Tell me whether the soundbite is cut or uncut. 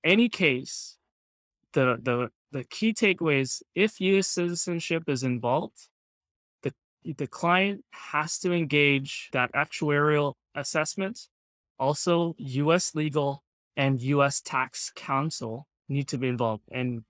uncut